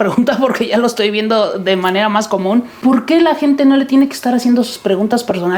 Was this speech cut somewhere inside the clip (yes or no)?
no